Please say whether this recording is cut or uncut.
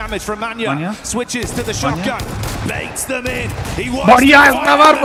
uncut